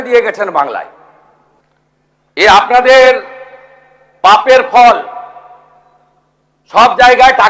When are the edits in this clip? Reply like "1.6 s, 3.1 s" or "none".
1.5 s